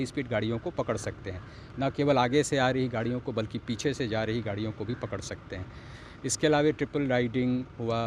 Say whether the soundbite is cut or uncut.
uncut